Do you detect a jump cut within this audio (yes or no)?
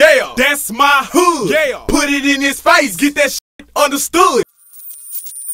yes